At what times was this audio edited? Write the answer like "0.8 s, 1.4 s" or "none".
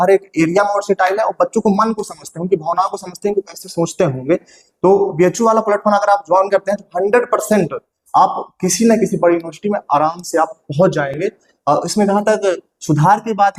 none